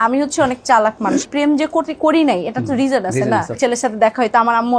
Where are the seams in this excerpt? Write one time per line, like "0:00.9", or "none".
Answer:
0:01.2
0:03.6